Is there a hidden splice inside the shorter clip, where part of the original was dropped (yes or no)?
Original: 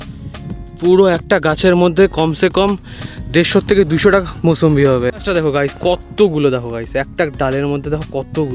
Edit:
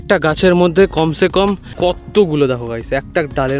yes